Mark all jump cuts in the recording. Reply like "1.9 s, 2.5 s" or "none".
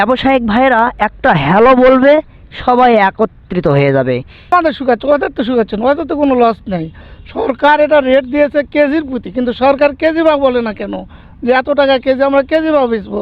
4.5 s